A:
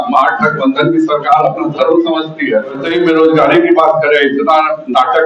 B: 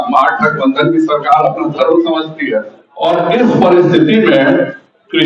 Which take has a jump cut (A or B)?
A